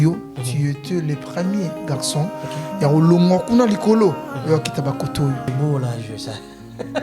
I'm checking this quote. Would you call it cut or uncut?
cut